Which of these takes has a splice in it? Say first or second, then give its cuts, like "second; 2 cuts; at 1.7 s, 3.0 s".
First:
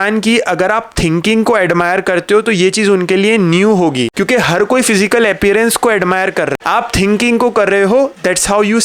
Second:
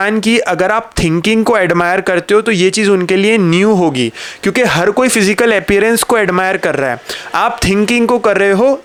first; 2 cuts; at 4.1 s, 6.5 s